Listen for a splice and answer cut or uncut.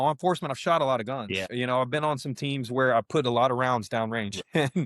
cut